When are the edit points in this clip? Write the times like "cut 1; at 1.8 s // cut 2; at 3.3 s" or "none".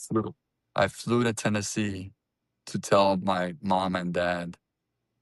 none